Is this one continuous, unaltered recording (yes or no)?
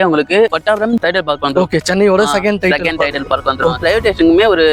no